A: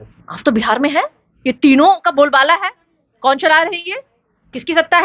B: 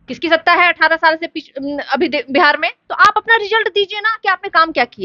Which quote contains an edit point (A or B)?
B